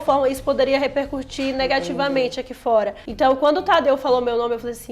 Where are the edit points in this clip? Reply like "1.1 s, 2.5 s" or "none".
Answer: 3.0 s